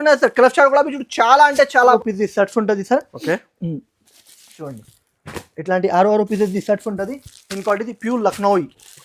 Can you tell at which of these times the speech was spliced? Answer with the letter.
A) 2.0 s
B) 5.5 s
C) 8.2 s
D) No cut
A